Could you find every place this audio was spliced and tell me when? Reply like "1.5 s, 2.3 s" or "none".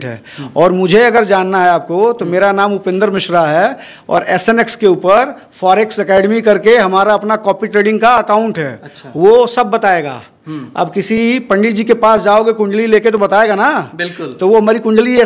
none